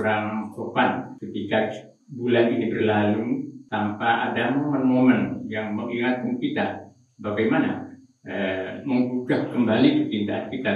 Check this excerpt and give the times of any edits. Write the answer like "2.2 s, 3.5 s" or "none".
1.2 s, 3.6 s